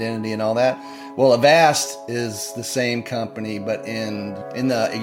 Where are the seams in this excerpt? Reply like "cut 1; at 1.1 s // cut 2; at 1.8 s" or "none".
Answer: none